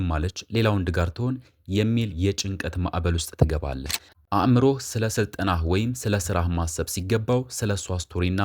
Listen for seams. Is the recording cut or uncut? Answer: cut